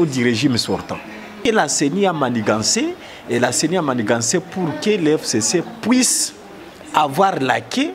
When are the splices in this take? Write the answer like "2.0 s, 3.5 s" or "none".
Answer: 1.4 s